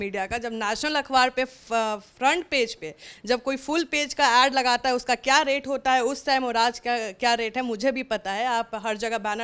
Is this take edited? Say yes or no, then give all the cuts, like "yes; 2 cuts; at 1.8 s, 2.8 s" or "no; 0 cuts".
no; 0 cuts